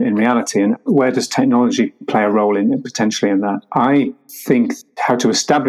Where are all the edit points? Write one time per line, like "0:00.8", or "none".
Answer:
none